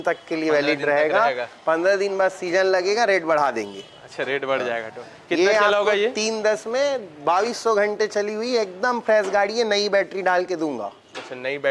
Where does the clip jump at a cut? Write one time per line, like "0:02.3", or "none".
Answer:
none

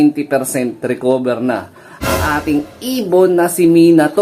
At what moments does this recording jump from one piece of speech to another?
none

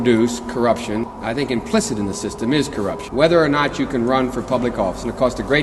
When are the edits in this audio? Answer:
0:01.1
0:03.0

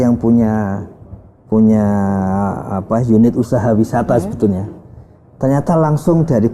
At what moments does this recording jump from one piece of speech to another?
none

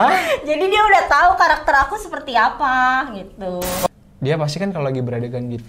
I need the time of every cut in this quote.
0:03.9

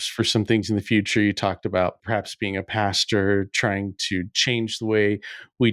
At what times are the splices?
0:02.0

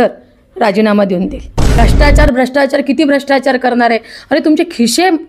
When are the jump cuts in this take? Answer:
0:01.8

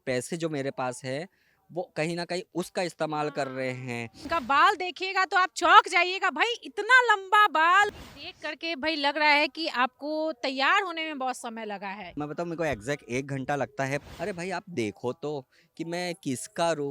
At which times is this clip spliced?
0:04.2
0:07.9
0:12.1
0:14.0

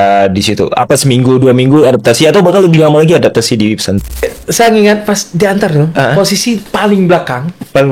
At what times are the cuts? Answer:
0:04.2

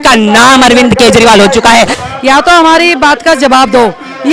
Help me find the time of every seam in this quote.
0:02.0

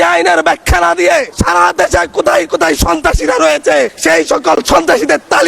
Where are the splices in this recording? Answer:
0:01.3
0:04.0

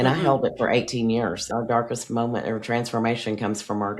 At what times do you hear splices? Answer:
0:01.4

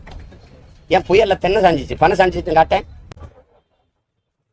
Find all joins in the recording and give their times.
none

